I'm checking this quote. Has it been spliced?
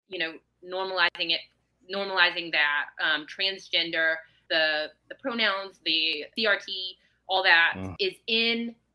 yes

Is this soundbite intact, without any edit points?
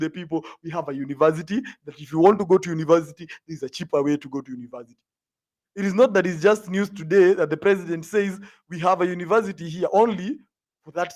yes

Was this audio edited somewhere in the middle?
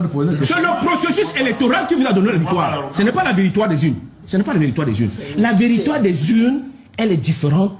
no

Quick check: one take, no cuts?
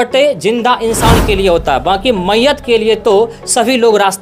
yes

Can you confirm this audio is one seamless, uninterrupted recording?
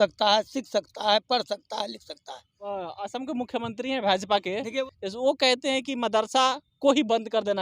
no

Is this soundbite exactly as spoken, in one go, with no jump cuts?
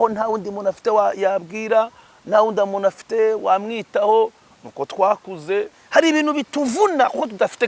no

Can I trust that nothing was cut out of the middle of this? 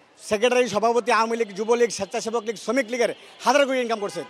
yes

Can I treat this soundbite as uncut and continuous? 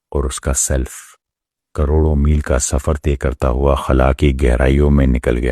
no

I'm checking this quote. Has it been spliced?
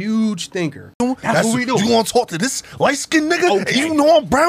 yes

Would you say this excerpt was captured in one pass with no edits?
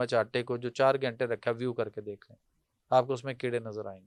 yes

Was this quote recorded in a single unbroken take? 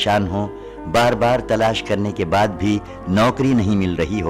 yes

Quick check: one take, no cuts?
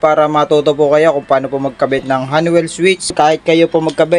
no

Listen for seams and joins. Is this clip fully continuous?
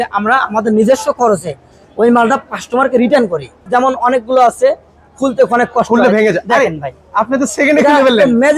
no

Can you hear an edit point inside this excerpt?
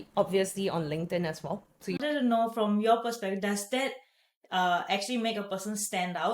yes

